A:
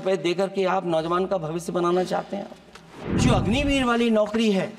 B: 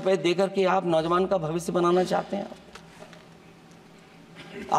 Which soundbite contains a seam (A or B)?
A